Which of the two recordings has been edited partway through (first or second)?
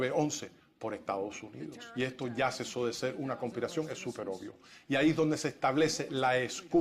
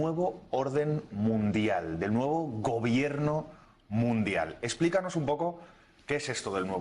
second